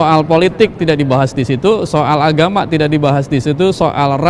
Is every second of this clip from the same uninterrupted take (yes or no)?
yes